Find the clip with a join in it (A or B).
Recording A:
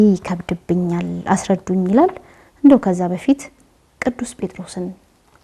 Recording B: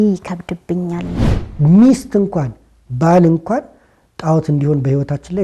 B